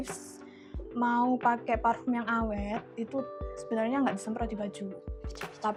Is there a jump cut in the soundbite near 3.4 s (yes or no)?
no